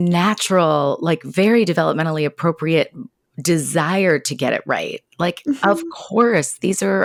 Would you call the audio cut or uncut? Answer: uncut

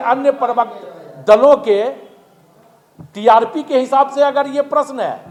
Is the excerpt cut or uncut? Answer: uncut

